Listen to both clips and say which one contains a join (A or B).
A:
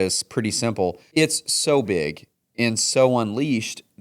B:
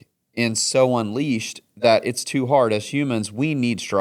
A